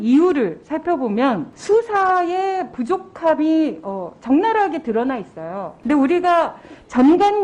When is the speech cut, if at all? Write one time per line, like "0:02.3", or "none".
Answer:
0:01.5
0:05.7